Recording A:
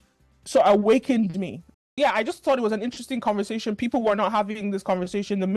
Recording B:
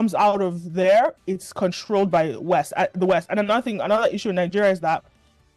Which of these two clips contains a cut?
A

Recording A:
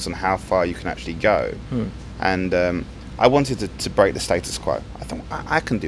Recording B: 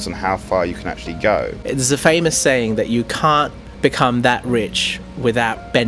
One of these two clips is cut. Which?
B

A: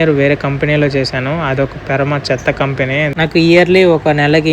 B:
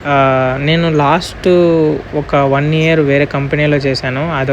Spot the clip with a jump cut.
A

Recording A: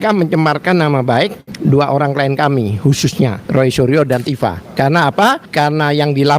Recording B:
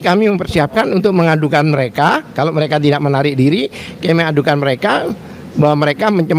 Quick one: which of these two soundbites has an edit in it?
A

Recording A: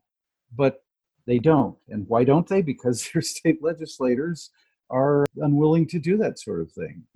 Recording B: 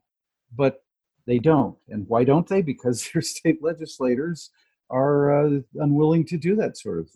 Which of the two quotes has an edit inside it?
A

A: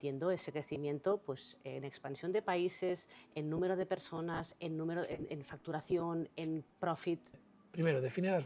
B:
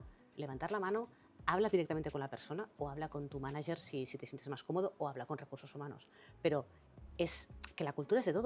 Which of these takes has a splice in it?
A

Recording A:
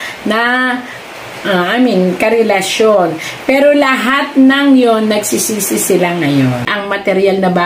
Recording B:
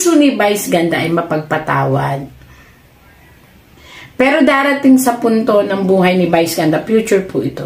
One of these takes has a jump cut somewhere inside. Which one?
A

